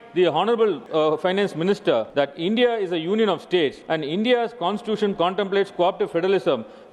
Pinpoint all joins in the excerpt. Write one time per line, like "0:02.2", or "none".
0:00.8
0:02.1
0:03.8